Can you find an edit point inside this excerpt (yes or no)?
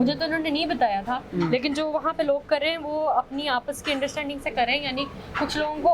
no